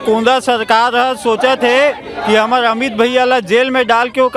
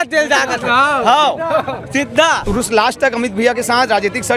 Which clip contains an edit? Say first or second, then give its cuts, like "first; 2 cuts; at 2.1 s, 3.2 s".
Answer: second; 1 cut; at 2.4 s